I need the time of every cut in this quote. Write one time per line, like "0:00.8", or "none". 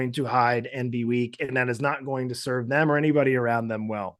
none